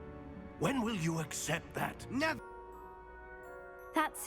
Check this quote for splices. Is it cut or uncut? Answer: cut